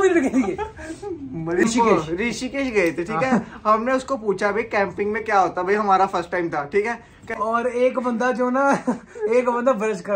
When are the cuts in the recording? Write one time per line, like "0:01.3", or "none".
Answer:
0:01.6
0:07.2